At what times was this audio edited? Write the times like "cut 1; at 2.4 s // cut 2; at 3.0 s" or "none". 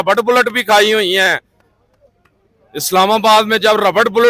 none